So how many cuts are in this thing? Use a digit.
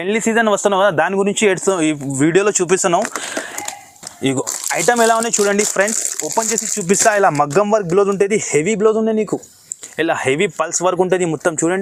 0